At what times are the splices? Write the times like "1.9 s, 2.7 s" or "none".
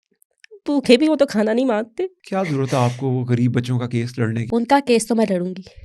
2.2 s, 4.4 s